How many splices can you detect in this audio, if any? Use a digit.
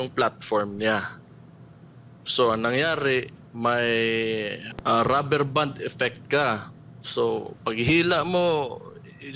1